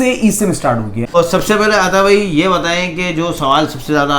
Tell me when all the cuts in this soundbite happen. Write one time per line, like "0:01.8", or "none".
0:01.0